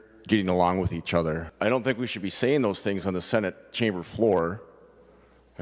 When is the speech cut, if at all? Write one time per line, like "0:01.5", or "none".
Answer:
0:01.5